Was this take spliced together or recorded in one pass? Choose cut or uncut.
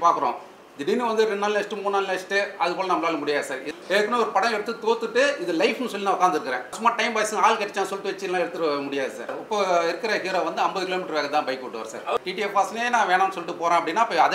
cut